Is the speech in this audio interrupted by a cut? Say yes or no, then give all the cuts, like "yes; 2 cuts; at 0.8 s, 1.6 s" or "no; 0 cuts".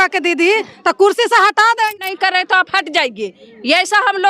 yes; 1 cut; at 2.0 s